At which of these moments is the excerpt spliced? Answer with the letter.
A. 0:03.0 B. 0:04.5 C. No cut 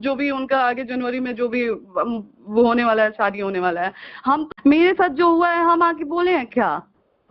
B